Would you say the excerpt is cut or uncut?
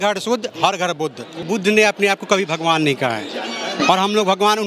cut